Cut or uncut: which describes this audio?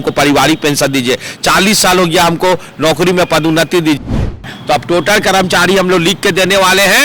cut